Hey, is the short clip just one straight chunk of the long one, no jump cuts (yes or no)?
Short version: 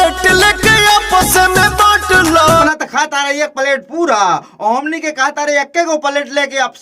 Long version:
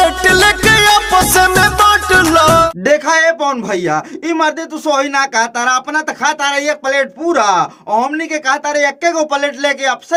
no